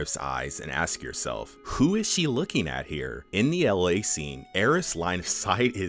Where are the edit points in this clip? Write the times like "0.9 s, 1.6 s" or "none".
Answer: 1.6 s, 3.2 s